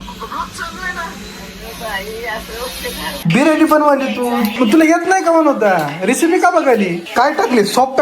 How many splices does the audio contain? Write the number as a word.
three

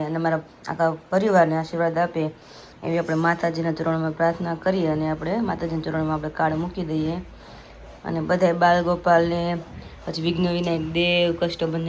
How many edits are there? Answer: zero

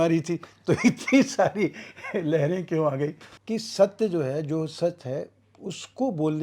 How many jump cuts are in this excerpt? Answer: one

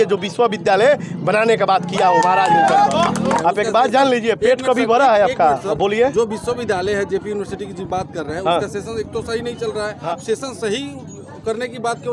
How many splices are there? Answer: two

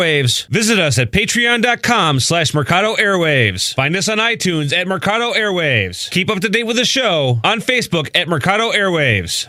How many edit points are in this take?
zero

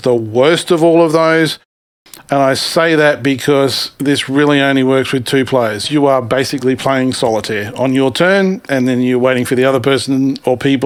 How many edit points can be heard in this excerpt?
zero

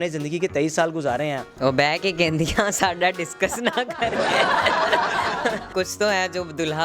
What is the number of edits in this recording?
two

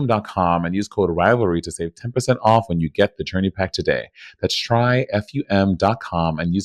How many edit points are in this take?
zero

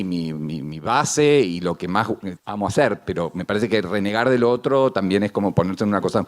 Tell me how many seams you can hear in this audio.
one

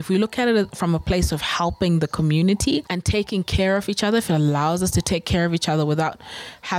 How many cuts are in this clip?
one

